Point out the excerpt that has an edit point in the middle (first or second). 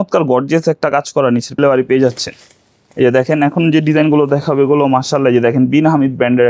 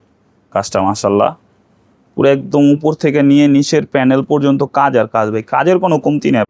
first